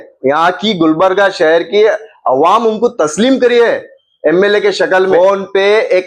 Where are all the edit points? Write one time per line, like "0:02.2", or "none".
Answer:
0:05.1